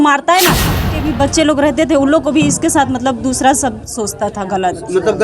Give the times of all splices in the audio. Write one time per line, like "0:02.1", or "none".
0:01.0